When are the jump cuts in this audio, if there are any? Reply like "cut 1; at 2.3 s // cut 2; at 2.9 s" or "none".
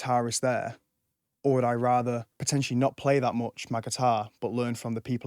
cut 1; at 2.3 s